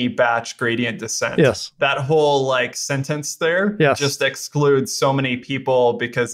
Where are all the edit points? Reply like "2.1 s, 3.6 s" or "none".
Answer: 3.9 s